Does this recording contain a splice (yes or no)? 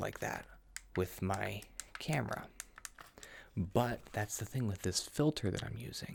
no